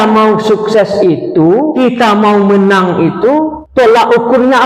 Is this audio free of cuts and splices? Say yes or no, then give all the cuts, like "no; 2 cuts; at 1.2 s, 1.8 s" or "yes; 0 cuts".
no; 2 cuts; at 1.7 s, 3.6 s